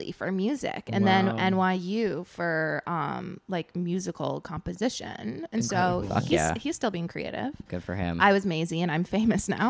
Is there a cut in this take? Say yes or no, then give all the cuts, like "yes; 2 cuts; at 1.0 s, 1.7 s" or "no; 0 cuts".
no; 0 cuts